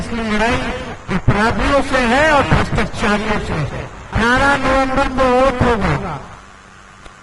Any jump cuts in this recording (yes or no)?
yes